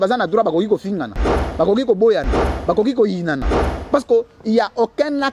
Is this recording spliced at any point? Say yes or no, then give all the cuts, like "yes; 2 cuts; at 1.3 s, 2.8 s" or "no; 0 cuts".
no; 0 cuts